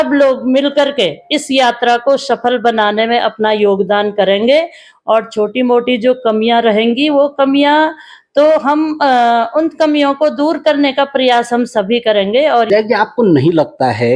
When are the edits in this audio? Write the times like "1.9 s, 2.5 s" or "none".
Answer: 12.7 s

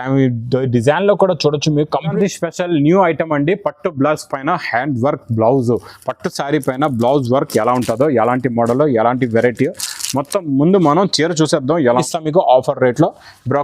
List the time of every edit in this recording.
2.1 s, 11.8 s

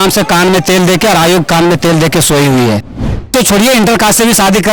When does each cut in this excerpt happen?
3.3 s

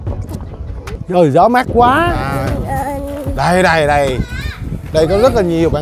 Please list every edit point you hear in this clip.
1.0 s, 2.2 s

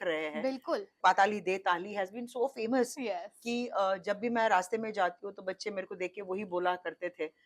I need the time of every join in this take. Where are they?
0.9 s

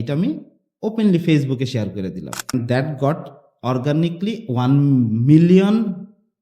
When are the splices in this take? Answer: 2.5 s

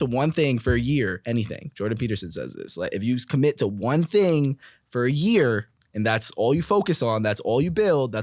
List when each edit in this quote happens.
1.2 s

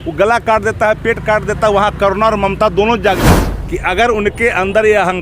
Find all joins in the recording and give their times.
3.2 s

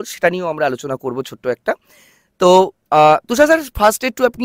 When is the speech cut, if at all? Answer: none

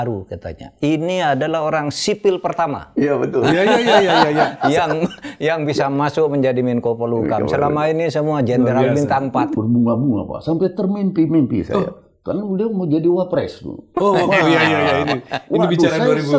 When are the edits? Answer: 9.5 s

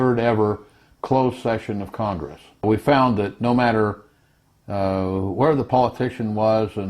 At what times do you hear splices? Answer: 2.6 s

